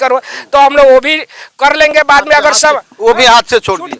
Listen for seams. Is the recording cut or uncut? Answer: uncut